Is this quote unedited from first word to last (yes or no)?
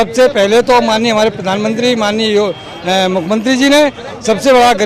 yes